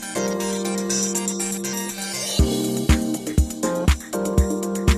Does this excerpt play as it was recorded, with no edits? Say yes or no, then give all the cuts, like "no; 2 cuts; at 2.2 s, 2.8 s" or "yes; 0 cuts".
no; 1 cut; at 3.9 s